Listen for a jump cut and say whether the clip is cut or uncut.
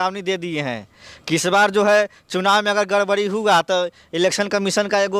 uncut